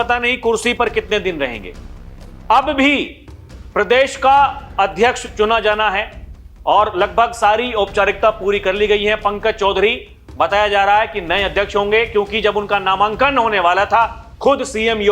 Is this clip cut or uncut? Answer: uncut